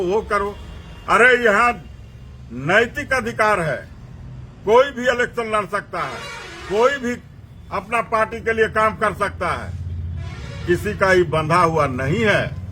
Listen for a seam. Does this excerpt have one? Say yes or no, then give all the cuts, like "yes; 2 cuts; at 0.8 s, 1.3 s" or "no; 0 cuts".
no; 0 cuts